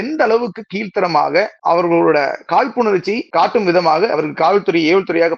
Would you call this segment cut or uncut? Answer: cut